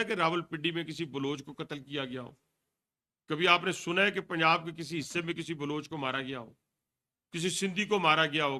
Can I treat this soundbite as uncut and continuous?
yes; 0 cuts

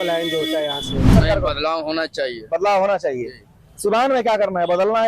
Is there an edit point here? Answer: yes; 1 cut; at 1.1 s

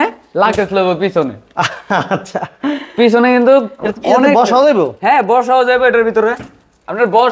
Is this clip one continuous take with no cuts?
yes; 0 cuts

